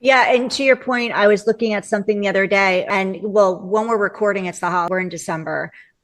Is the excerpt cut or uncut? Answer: cut